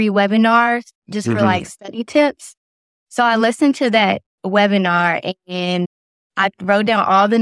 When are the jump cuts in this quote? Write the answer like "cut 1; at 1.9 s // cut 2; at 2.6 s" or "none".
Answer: none

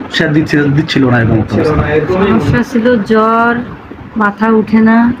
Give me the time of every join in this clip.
cut 1; at 2.3 s

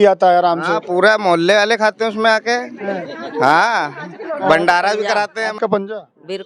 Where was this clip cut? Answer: cut 1; at 5.4 s

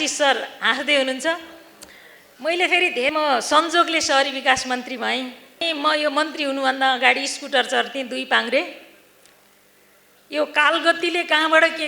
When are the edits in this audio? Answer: cut 1; at 3.1 s // cut 2; at 5.6 s

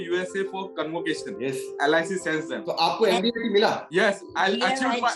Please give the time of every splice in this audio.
cut 1; at 1.3 s // cut 2; at 2.6 s // cut 3; at 3.8 s

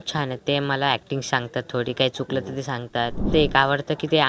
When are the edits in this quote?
cut 1; at 3.3 s

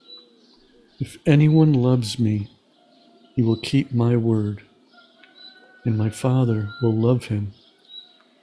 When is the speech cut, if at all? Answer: cut 1; at 1.0 s

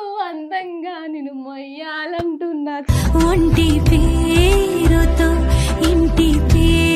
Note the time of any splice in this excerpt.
none

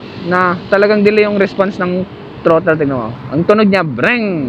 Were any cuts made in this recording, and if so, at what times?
cut 1; at 3.2 s

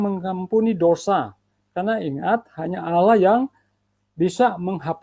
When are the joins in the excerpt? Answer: none

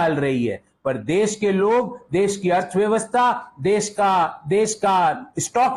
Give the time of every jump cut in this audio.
none

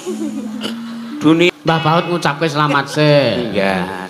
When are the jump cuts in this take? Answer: cut 1; at 1.5 s

